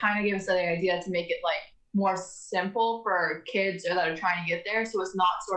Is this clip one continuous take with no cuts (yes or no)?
yes